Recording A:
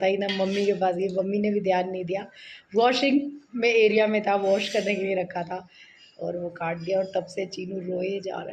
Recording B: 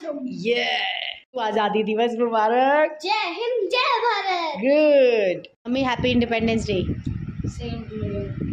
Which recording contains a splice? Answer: B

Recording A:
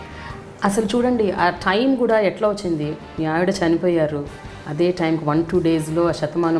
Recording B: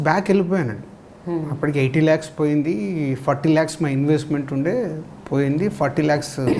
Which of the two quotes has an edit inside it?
A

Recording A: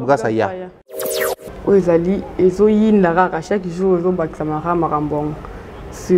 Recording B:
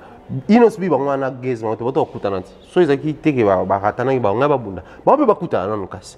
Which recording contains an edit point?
A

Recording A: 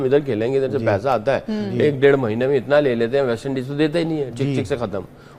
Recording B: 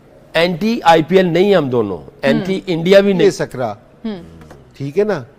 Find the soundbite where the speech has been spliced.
B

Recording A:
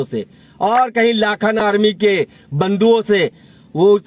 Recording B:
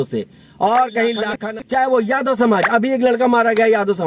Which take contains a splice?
B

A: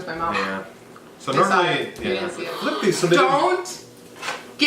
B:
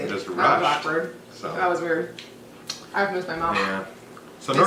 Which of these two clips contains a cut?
A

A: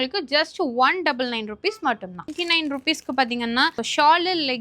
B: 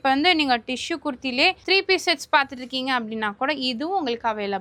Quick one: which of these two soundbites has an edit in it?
A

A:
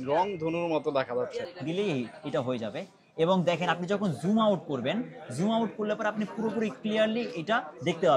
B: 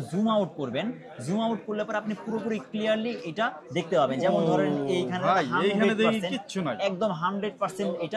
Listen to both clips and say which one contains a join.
A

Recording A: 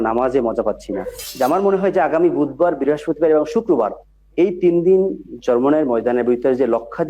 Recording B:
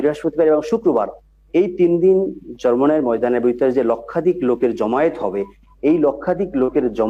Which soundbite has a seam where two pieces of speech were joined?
A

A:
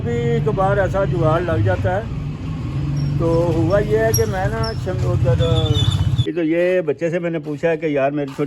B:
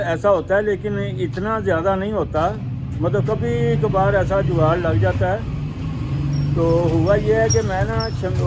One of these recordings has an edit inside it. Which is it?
A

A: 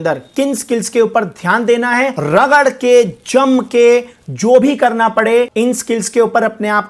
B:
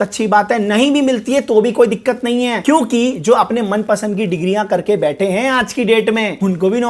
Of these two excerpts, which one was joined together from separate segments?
A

